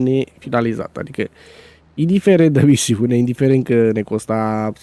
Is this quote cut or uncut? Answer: uncut